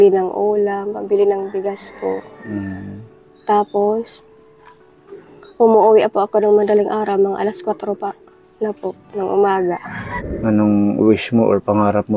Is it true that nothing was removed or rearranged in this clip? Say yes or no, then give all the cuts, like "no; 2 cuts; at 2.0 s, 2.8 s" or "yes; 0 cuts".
no; 1 cut; at 10.1 s